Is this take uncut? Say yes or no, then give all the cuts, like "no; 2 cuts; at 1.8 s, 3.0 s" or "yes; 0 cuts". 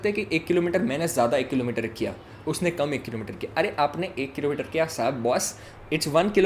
yes; 0 cuts